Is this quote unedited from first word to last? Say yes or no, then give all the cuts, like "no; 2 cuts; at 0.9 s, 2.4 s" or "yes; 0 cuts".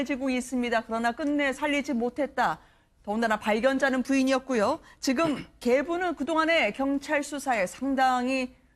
no; 1 cut; at 1.4 s